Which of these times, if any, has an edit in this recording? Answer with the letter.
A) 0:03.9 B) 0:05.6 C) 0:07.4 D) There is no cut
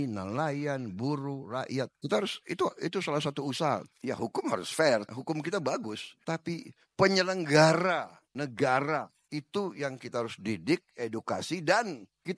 A